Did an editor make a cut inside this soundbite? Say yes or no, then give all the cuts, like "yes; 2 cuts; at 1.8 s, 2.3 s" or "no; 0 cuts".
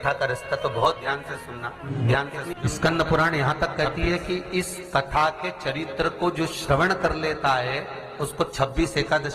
yes; 2 cuts; at 1.8 s, 2.5 s